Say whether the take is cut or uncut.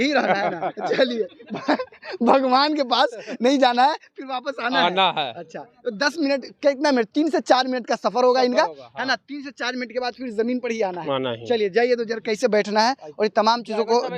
uncut